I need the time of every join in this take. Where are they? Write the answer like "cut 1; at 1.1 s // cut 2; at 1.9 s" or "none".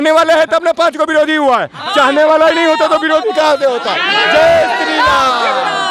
none